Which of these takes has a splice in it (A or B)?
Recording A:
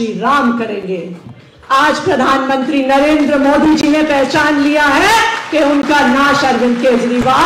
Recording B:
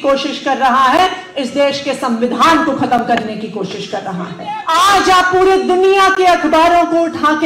B